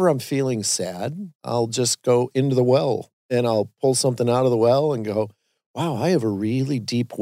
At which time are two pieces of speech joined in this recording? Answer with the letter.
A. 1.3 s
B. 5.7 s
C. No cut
A